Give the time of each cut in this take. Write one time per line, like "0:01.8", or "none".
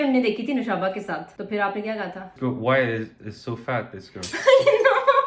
none